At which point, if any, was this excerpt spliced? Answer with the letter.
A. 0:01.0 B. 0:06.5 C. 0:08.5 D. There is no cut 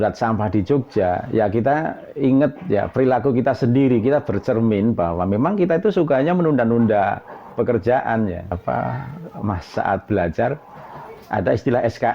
C